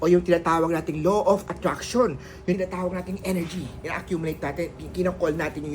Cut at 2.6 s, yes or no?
yes